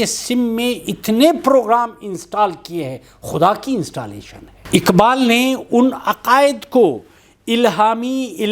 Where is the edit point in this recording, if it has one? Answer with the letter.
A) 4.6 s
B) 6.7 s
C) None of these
A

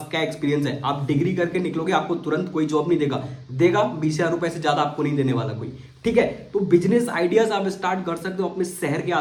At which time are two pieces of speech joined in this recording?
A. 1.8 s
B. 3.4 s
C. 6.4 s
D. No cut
D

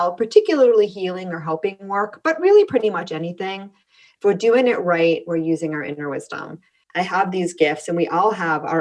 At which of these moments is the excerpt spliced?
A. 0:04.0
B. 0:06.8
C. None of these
B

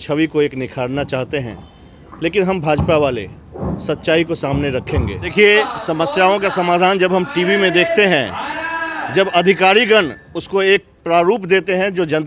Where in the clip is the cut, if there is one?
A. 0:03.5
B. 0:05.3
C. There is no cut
B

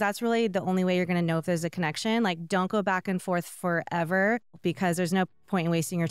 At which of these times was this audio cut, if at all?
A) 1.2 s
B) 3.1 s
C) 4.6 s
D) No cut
C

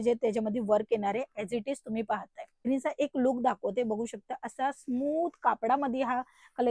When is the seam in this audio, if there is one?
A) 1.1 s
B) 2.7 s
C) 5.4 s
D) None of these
B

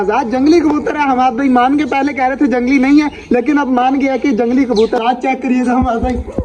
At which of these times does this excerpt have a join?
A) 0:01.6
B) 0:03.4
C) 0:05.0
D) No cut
C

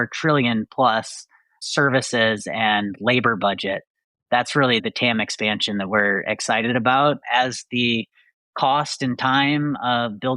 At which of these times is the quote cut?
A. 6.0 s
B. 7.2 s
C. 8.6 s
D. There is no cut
B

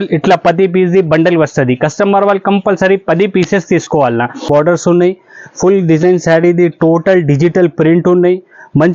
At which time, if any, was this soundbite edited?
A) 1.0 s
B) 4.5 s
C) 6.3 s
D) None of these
B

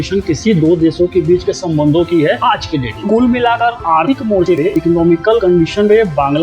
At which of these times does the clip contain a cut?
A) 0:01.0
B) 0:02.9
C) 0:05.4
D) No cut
B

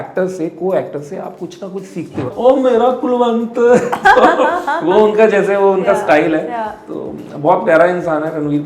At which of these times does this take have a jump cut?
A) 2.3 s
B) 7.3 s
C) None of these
A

